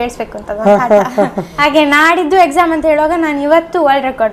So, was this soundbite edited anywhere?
yes; 1 cut; at 1.6 s

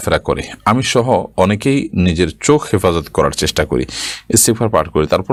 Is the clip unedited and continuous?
yes; 0 cuts

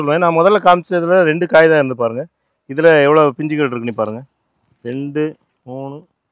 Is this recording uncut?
yes; 0 cuts

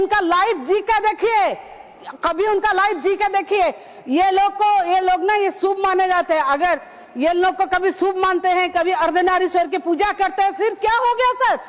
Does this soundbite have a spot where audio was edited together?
no; 0 cuts

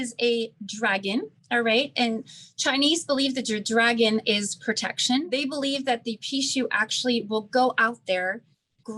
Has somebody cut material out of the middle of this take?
yes; 1 cut; at 5.3 s

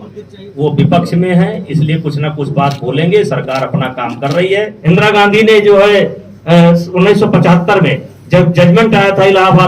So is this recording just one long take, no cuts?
no; 1 cut; at 4.7 s

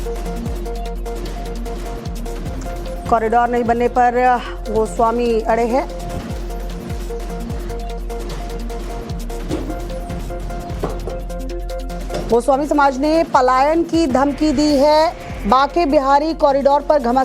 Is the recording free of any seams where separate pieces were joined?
no; 1 cut; at 10.2 s

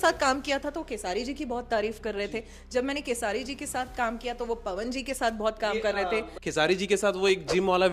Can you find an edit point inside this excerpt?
yes; 1 cut; at 6.3 s

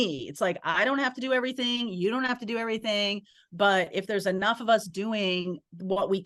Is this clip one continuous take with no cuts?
yes; 0 cuts

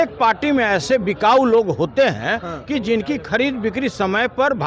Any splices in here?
no; 0 cuts

